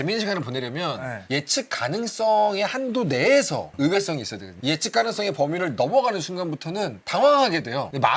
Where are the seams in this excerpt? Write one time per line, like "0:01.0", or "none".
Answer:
none